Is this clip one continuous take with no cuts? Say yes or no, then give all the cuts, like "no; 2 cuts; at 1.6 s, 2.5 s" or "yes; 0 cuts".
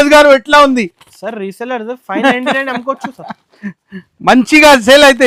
yes; 0 cuts